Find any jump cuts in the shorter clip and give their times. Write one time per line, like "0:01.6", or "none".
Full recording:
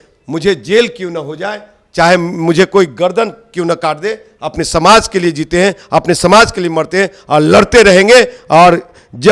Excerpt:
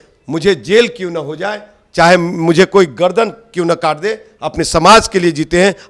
none